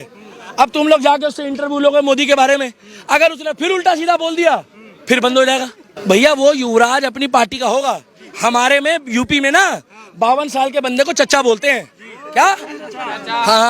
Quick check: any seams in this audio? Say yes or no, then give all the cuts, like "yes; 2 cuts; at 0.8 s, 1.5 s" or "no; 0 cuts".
yes; 1 cut; at 5.9 s